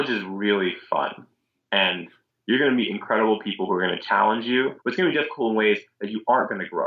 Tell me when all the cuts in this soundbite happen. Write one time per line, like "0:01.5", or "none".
0:04.8